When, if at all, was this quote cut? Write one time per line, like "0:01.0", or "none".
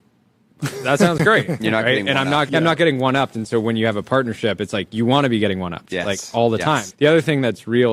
0:02.5
0:06.9

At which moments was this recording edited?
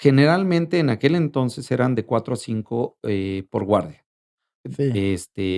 none

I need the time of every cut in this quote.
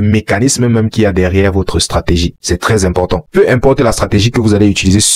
0:02.4

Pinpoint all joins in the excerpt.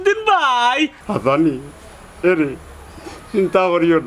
0:01.0

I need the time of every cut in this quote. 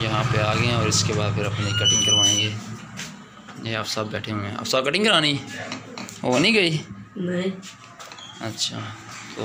none

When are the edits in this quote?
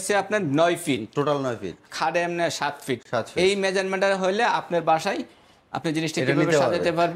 none

